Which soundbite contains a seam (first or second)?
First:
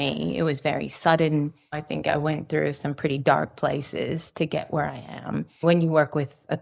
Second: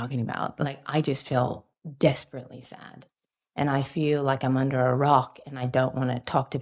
first